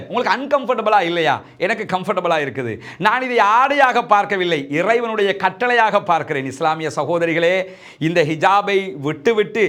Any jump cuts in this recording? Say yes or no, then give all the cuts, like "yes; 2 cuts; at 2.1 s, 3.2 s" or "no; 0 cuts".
no; 0 cuts